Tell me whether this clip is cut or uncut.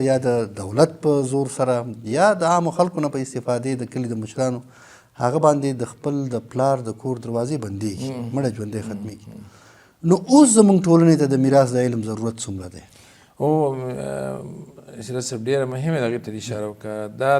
uncut